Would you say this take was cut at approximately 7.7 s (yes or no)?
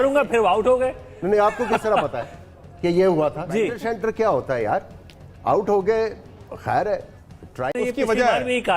yes